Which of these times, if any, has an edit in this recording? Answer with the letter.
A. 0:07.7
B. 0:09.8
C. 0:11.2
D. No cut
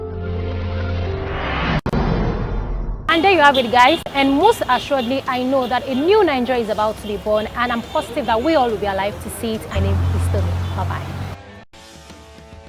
B